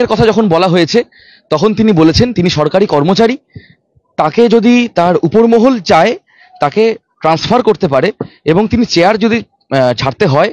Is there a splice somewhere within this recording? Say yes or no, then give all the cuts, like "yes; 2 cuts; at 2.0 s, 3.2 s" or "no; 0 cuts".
no; 0 cuts